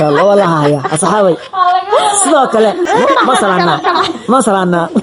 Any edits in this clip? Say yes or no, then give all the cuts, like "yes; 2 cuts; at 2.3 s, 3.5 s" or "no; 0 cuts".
yes; 1 cut; at 2.9 s